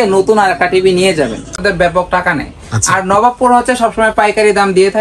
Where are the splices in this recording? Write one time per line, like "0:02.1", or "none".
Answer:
0:01.6